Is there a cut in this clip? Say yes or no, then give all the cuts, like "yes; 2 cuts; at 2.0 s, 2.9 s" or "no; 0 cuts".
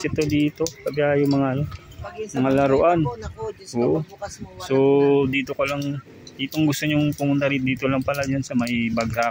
no; 0 cuts